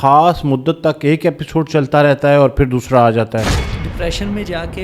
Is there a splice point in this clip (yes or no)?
yes